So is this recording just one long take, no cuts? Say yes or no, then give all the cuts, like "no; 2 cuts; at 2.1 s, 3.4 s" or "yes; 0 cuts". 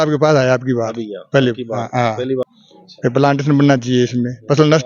no; 1 cut; at 2.4 s